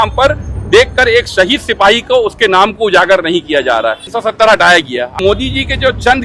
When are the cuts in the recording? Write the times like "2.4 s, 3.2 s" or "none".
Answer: 4.1 s, 5.2 s